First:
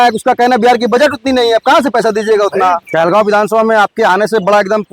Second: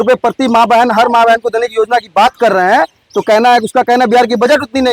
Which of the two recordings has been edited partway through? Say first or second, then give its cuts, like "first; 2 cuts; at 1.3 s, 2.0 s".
first; 1 cut; at 2.8 s